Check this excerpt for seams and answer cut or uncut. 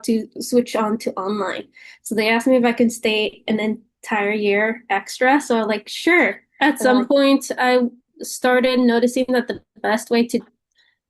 cut